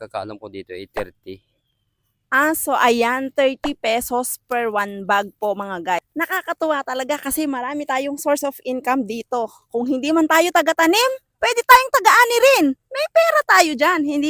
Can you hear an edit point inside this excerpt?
yes; 1 cut; at 6.0 s

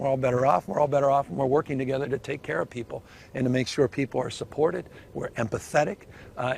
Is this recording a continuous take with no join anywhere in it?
yes; 0 cuts

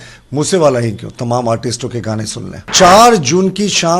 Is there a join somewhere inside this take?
yes; 1 cut; at 2.7 s

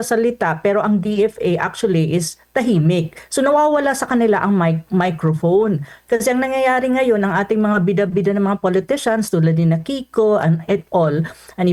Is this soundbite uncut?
yes; 0 cuts

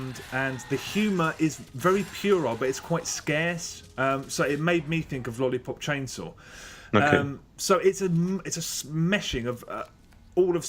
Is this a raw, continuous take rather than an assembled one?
yes; 0 cuts

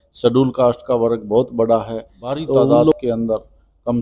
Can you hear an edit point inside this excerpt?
yes; 1 cut; at 2.9 s

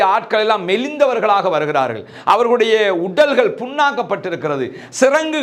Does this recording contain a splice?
no; 0 cuts

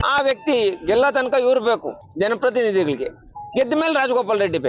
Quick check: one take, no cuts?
no; 1 cut; at 2.0 s

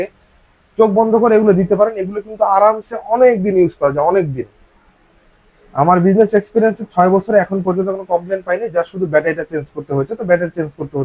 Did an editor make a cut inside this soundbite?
no; 0 cuts

